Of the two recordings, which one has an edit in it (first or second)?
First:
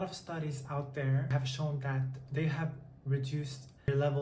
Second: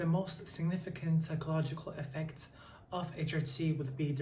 first